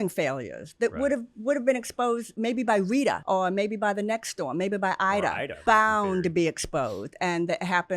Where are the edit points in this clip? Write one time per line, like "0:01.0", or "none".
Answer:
0:02.3
0:03.2
0:05.5